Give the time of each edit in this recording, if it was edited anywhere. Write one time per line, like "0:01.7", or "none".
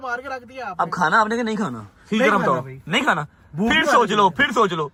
none